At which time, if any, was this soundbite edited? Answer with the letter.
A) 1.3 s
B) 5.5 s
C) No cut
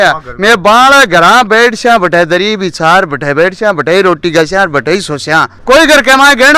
B